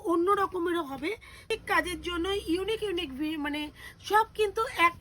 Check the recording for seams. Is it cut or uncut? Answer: cut